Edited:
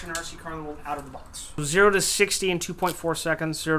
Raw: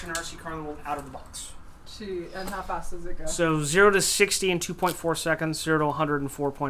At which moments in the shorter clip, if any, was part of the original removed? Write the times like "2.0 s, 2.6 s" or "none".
1.6 s